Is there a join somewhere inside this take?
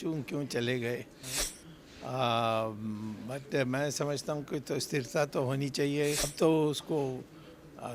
yes; 1 cut; at 6.3 s

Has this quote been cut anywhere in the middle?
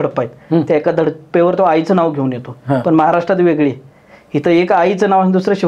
no; 0 cuts

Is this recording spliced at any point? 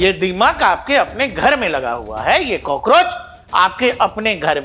no; 0 cuts

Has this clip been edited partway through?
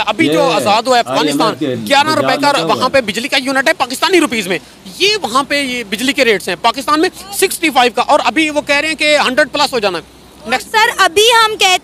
no; 0 cuts

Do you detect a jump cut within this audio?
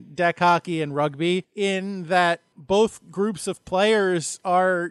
yes; 1 cut; at 2.5 s

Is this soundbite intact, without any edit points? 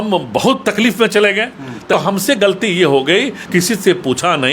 no; 2 cuts; at 1.9 s, 3.4 s

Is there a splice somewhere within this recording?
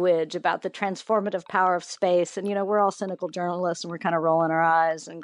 no; 0 cuts

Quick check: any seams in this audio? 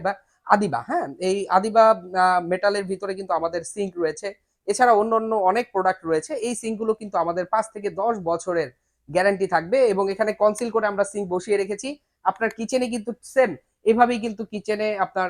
no; 0 cuts

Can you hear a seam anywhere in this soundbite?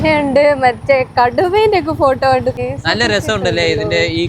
yes; 1 cut; at 2.5 s

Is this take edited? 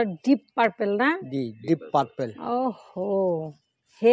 no; 0 cuts

